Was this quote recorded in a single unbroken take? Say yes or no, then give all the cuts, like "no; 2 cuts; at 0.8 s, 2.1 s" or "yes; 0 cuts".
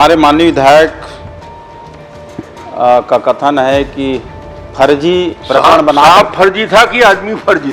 yes; 0 cuts